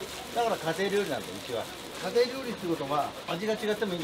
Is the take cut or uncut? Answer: cut